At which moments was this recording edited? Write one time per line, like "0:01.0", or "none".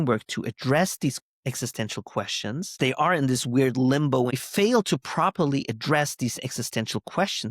0:02.7
0:04.4